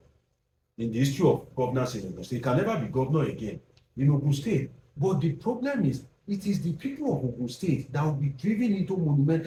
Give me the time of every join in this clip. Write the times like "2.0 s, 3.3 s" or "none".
none